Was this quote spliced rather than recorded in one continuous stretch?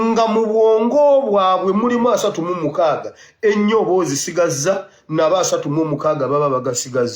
yes; 1 cut; at 1.3 s

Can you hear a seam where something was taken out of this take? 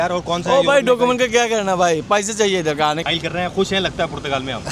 yes; 1 cut; at 3.0 s

